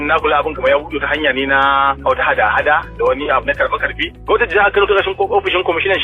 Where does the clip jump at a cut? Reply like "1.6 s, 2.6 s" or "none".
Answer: 4.1 s